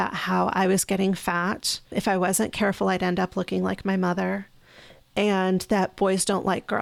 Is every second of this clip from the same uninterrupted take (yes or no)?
no